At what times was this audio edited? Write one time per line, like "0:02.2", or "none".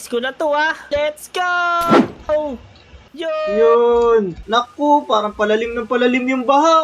0:04.4